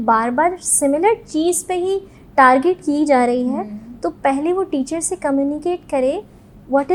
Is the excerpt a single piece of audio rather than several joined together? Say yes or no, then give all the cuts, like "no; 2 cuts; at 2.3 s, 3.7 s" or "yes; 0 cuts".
yes; 0 cuts